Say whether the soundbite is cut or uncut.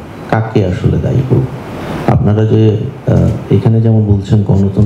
uncut